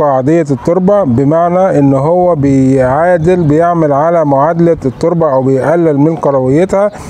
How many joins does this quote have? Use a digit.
0